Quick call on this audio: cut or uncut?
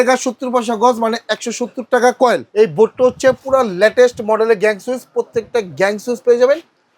cut